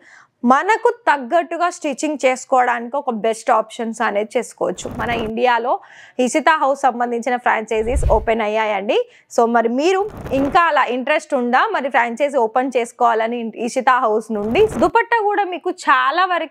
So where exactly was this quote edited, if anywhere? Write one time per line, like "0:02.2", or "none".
0:05.0
0:14.7